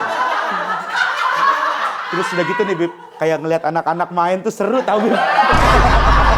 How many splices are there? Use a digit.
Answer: 1